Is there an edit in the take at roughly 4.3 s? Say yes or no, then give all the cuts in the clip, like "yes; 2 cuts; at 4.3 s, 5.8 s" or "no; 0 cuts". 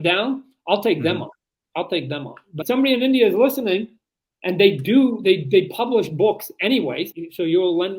no; 2 cuts; at 2.6 s, 7.1 s